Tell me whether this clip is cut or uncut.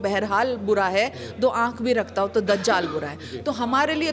uncut